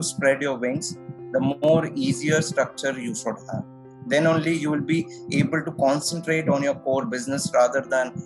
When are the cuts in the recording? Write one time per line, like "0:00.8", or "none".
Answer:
none